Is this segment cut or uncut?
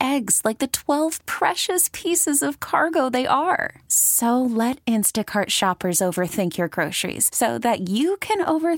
uncut